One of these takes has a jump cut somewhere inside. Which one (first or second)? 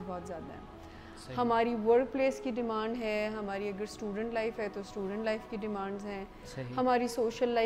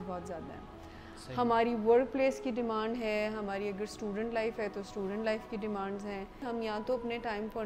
second